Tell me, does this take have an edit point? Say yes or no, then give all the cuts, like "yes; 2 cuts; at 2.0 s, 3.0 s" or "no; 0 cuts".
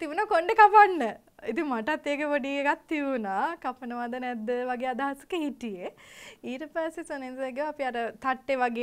no; 0 cuts